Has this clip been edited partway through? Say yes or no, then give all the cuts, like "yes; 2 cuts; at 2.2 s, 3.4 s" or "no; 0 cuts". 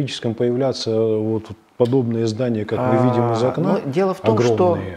no; 0 cuts